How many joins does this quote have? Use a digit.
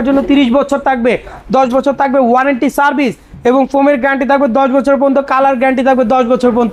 0